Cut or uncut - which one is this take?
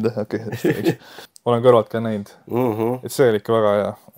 cut